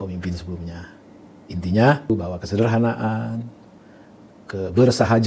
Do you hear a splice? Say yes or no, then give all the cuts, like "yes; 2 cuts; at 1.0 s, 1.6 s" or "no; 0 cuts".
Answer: yes; 1 cut; at 2.1 s